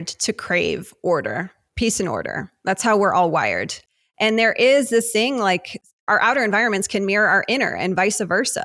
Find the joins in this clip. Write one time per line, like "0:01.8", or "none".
0:03.8
0:06.1